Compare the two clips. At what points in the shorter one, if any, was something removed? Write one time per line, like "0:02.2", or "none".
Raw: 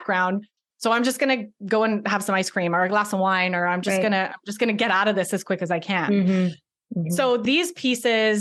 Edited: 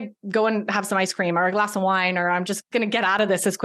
0:02.5